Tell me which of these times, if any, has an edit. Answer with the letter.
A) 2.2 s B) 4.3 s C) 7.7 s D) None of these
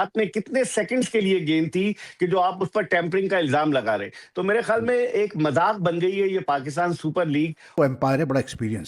C